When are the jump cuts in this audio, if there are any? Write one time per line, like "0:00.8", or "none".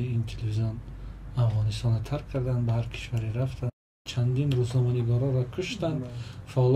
0:04.1

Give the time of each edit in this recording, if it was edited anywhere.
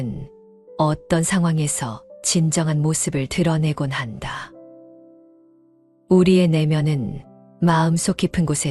none

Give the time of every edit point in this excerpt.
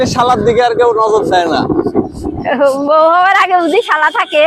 none

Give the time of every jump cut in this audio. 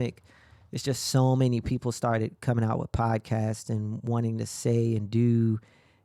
none

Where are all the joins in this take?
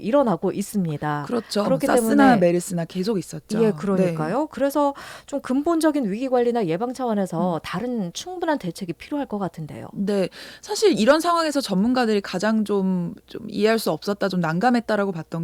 none

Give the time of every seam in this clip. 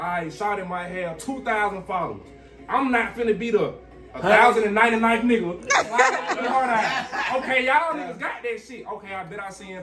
none

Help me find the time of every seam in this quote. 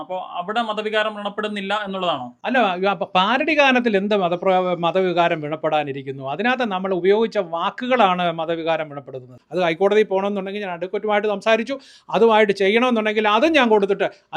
0:09.4

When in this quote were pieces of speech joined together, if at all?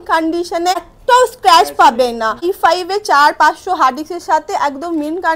0:00.9
0:02.4

